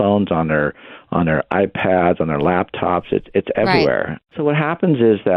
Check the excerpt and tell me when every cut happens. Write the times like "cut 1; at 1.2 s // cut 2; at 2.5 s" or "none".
cut 1; at 4.3 s